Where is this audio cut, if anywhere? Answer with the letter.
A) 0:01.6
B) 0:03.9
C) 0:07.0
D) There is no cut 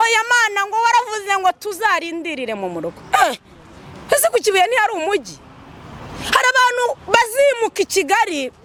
D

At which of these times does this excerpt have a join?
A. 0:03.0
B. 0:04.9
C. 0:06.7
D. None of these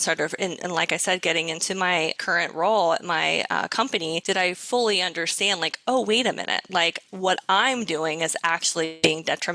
D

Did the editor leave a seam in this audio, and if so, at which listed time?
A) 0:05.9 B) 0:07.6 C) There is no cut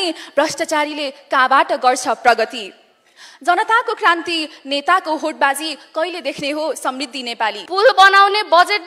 B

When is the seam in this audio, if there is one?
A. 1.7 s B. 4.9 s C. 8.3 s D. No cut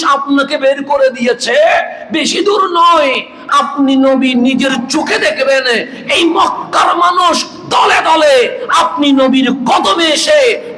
D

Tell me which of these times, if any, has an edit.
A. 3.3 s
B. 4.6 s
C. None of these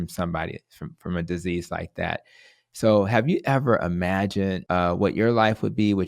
B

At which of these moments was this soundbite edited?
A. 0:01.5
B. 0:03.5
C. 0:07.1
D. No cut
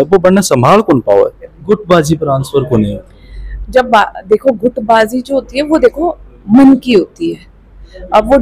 A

